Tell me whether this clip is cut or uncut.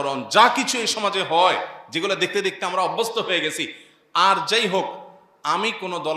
uncut